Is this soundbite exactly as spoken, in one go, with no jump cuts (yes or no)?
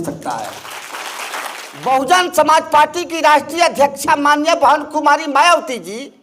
no